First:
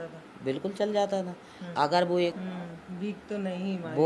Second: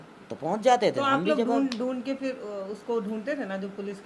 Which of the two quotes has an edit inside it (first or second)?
first